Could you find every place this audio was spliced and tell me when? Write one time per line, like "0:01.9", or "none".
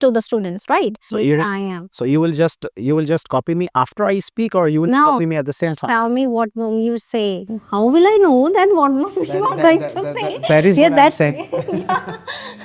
0:01.0